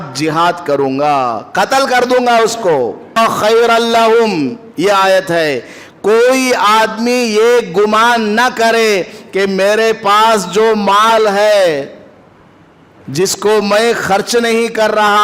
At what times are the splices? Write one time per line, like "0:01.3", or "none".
0:03.2

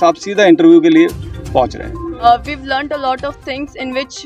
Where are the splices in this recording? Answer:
0:02.2

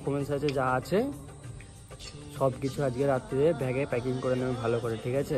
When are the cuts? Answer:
none

